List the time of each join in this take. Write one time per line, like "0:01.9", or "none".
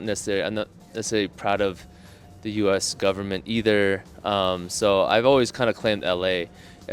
none